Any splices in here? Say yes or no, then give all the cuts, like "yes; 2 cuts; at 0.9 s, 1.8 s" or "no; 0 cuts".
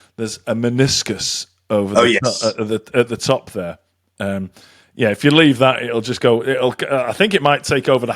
no; 0 cuts